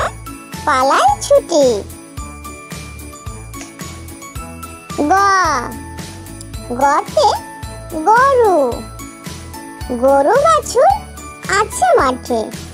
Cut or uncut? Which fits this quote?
uncut